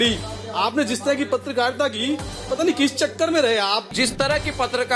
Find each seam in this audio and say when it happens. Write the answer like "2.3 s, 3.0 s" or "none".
3.9 s